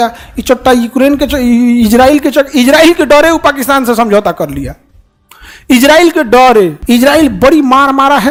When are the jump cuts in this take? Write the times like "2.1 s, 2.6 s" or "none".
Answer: none